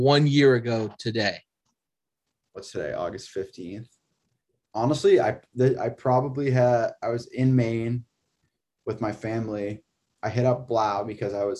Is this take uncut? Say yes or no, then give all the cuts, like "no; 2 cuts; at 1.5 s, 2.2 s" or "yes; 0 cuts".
yes; 0 cuts